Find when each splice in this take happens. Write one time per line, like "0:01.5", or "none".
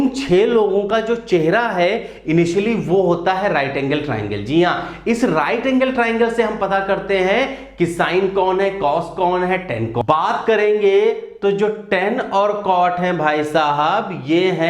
0:10.0